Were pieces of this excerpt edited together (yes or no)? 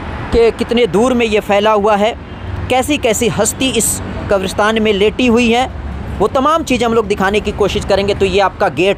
no